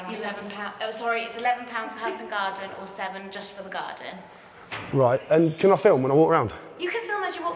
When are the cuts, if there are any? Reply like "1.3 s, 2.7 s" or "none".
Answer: none